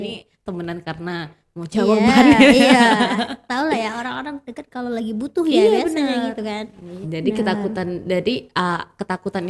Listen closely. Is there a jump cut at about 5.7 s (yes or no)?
no